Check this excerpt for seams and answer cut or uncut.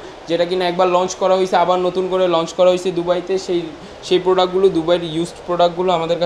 uncut